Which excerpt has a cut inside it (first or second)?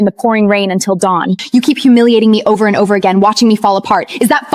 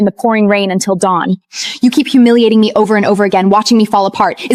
first